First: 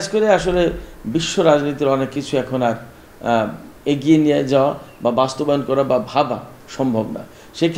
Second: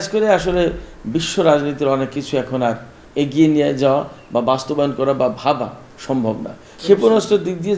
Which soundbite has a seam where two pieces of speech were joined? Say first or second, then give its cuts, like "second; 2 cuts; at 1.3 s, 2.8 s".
second; 2 cuts; at 3.0 s, 6.7 s